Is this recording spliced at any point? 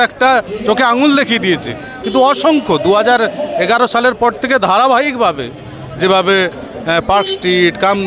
no; 0 cuts

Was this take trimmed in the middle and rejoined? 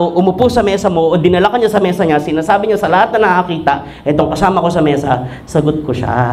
no; 0 cuts

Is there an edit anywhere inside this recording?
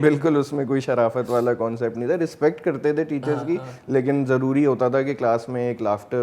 no; 0 cuts

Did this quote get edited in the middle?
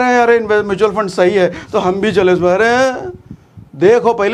no; 0 cuts

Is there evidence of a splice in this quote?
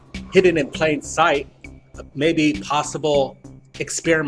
no; 0 cuts

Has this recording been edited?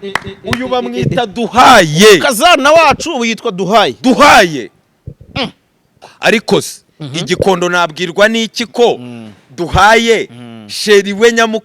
yes; 1 cut; at 6.1 s

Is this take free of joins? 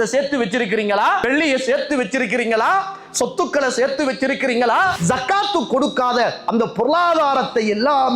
no; 2 cuts; at 1.2 s, 5.0 s

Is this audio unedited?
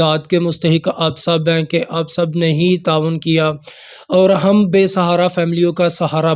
yes; 0 cuts

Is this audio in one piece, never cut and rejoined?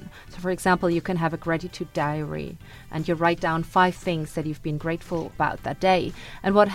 no; 1 cut; at 5.3 s

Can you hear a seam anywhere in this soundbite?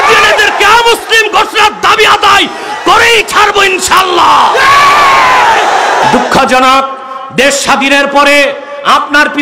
yes; 1 cut; at 6.0 s

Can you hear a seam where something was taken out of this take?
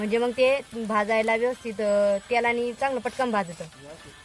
no; 0 cuts

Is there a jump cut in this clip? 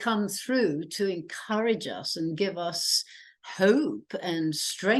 no; 0 cuts

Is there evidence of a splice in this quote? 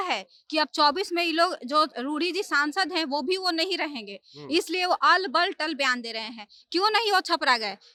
no; 0 cuts

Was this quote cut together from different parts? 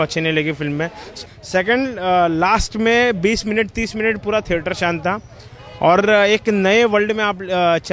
yes; 1 cut; at 1.2 s

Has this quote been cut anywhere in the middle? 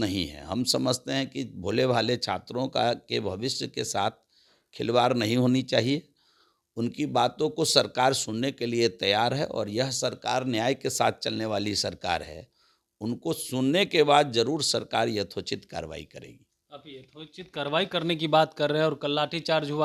no; 0 cuts

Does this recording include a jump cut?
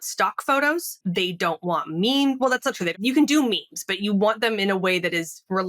yes; 2 cuts; at 0.9 s, 2.9 s

